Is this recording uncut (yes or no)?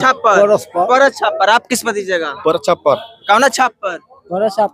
yes